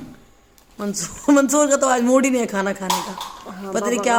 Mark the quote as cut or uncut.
uncut